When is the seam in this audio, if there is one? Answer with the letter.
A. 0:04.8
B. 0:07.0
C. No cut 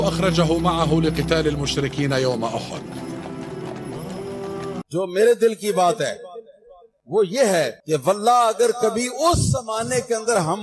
A